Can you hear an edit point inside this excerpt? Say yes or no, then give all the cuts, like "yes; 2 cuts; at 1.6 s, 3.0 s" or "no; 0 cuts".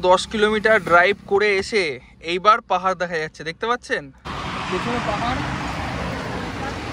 yes; 1 cut; at 4.3 s